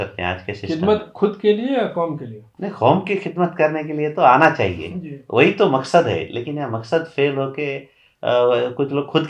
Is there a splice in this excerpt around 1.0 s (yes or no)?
no